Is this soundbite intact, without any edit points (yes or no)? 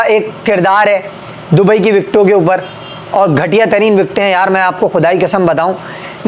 yes